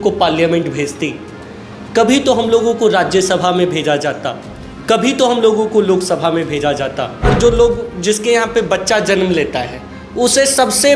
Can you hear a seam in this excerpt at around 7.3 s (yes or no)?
yes